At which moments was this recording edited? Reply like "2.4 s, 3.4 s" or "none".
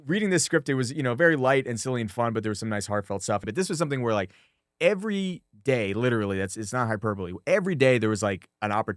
3.5 s